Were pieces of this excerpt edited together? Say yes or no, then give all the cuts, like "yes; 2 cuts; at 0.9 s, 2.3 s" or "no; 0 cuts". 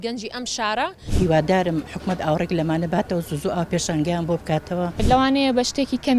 yes; 2 cuts; at 1.0 s, 5.0 s